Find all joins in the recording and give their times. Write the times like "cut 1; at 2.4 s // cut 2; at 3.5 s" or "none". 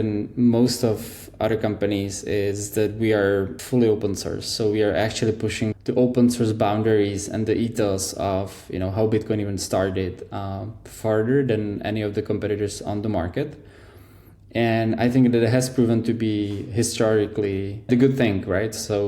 cut 1; at 3.6 s // cut 2; at 5.7 s // cut 3; at 17.9 s